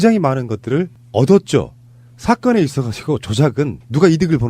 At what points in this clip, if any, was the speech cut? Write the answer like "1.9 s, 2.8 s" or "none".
2.5 s

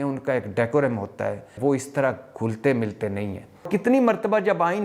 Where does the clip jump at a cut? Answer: 1.5 s, 3.6 s

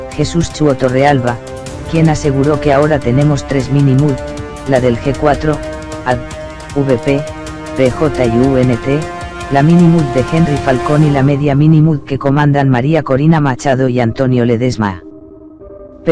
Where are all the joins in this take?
none

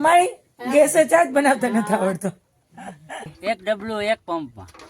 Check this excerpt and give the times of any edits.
3.3 s

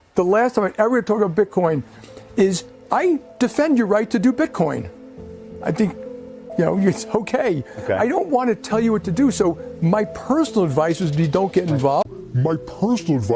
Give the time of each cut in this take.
9.5 s

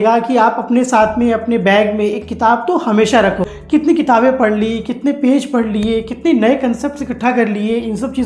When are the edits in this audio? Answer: 3.5 s

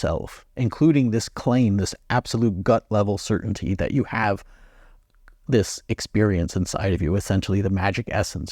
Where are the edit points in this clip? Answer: none

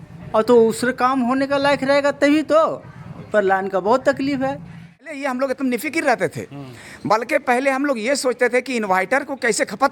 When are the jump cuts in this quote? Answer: 5.2 s

